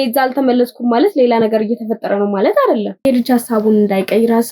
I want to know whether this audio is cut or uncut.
cut